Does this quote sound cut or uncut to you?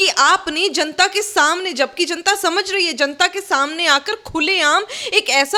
uncut